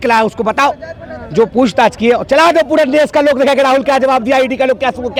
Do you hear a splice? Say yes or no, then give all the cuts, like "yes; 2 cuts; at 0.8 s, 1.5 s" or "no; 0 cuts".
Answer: no; 0 cuts